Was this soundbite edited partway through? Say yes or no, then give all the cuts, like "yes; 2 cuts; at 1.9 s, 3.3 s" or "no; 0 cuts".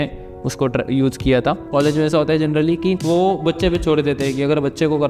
yes; 1 cut; at 1.6 s